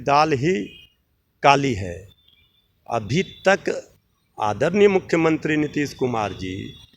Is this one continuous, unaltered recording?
yes; 0 cuts

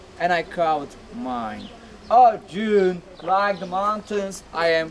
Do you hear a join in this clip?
no; 0 cuts

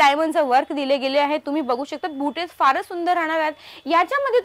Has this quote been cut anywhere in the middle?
no; 0 cuts

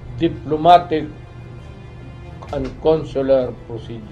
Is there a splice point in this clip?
no; 0 cuts

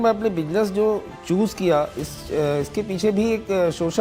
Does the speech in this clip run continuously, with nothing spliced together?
yes; 0 cuts

